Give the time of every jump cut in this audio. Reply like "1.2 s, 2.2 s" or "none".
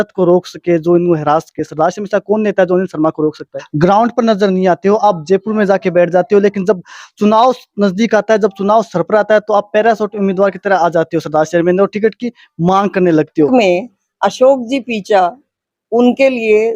3.6 s, 13.5 s